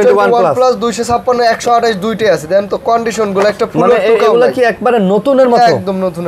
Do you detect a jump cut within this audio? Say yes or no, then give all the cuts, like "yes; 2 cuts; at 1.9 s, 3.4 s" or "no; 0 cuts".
no; 0 cuts